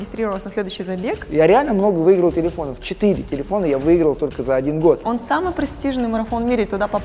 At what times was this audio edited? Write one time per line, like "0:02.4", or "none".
0:01.3
0:05.1